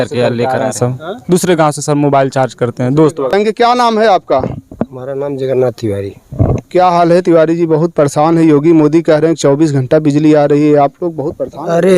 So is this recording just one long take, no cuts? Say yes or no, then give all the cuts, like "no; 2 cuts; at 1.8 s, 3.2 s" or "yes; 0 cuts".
no; 1 cut; at 3.3 s